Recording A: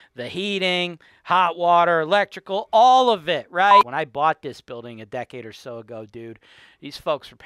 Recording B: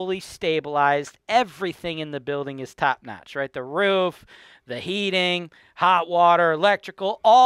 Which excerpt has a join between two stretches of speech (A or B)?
A